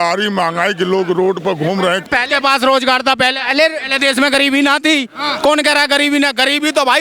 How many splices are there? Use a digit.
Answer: 1